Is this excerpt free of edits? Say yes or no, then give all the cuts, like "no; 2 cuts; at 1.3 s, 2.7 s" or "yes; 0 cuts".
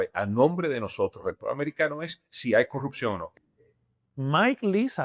no; 1 cut; at 3.3 s